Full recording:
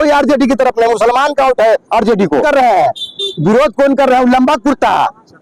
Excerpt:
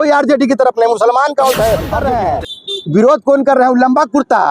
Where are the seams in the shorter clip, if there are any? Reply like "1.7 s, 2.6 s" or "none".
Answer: 2.0 s